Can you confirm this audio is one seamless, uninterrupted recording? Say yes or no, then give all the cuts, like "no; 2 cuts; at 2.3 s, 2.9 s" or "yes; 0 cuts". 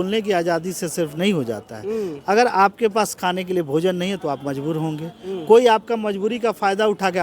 yes; 0 cuts